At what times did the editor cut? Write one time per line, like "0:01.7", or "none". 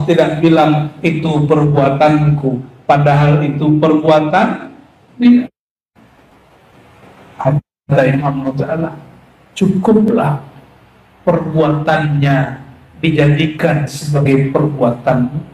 none